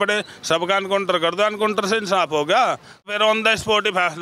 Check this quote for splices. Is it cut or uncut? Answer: cut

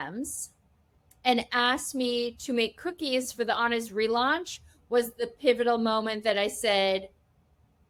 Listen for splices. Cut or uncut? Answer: uncut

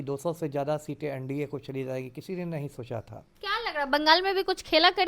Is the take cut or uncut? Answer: cut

